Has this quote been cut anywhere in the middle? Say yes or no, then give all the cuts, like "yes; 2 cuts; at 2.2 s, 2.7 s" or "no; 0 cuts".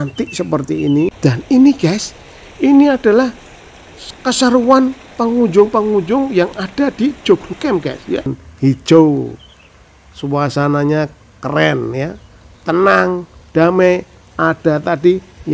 yes; 2 cuts; at 1.2 s, 8.3 s